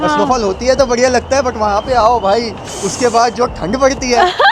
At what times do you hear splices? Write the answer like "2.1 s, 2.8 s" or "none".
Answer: none